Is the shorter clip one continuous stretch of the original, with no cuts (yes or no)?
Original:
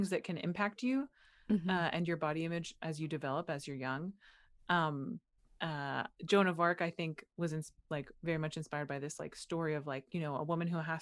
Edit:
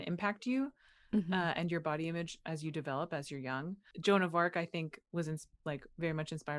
no